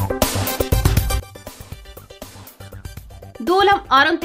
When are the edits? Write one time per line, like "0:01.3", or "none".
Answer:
none